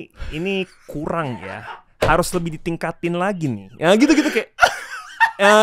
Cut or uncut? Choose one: uncut